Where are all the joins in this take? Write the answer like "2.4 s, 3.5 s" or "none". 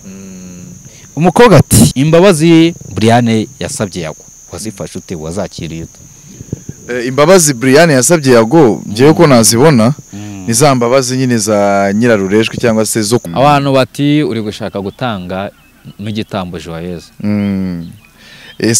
1.9 s, 13.2 s